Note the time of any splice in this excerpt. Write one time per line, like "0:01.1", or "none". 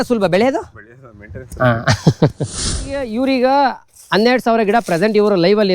0:03.0